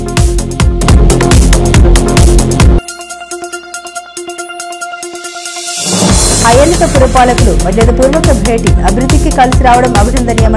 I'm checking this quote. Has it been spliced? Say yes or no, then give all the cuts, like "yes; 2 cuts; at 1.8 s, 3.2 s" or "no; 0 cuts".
no; 0 cuts